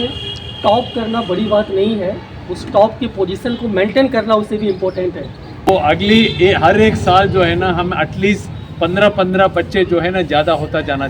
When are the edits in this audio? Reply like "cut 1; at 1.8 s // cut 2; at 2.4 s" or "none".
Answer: cut 1; at 5.7 s